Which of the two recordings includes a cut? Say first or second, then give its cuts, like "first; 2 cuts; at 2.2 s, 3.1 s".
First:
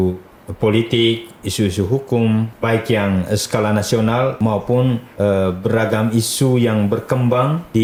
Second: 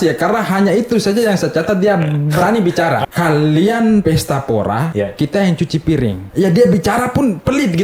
second; 4 cuts; at 3.0 s, 4.0 s, 4.9 s, 6.2 s